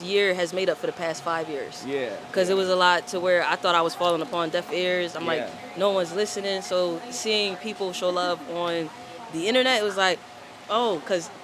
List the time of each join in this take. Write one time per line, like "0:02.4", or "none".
none